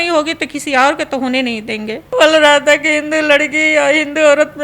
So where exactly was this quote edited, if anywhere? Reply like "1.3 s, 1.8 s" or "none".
2.0 s